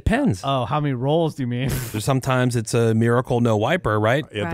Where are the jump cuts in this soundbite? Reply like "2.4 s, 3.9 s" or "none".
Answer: 1.9 s